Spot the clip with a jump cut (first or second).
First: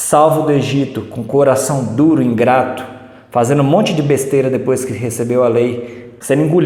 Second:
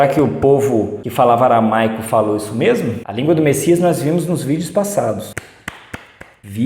second